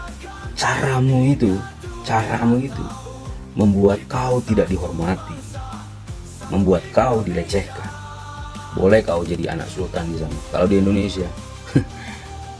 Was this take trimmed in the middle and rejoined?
no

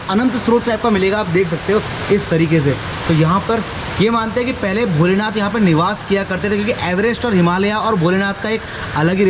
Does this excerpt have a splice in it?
no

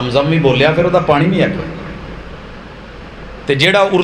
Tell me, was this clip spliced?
yes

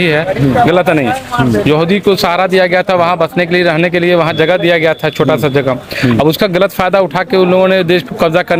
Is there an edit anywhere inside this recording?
no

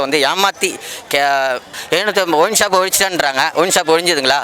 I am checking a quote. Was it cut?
yes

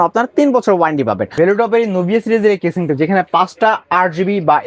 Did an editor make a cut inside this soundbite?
yes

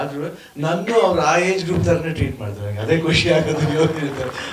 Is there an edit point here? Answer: no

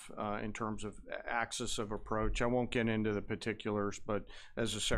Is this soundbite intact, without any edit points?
no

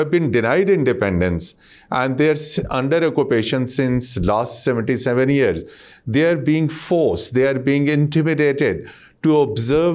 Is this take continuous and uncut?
yes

